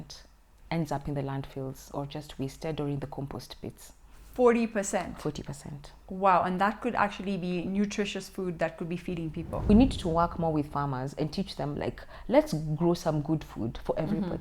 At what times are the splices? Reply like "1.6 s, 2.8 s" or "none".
9.7 s

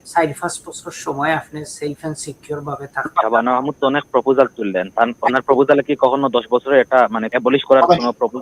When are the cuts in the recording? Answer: 3.1 s, 7.3 s

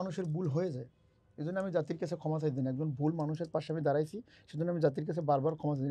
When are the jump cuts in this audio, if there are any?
none

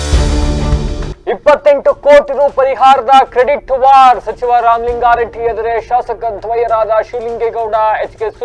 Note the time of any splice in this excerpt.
1.0 s

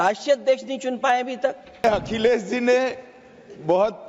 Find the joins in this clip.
1.8 s

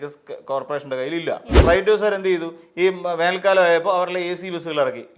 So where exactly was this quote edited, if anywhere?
1.6 s

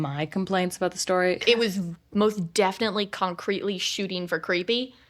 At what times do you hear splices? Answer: 1.4 s

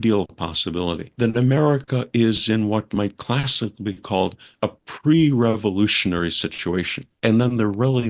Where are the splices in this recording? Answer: 1.1 s, 7.1 s

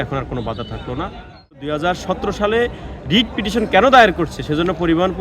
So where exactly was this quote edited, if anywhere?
1.6 s

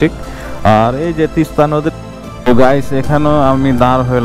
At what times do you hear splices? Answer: 1.9 s

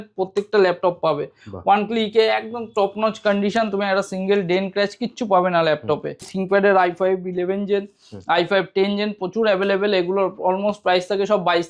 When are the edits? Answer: 6.3 s

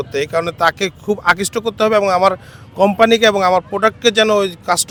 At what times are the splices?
none

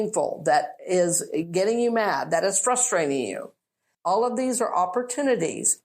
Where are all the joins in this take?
3.9 s

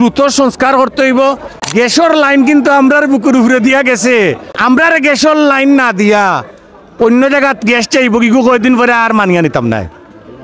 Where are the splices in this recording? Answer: 1.5 s, 4.5 s

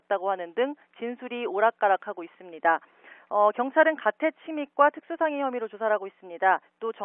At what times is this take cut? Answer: none

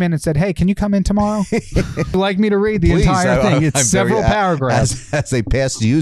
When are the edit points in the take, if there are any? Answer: 2.1 s

